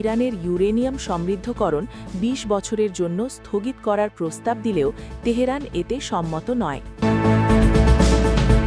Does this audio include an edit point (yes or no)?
yes